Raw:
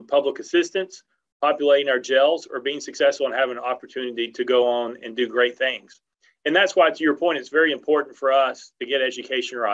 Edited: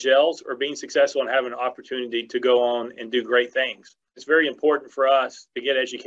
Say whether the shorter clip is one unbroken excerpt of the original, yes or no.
no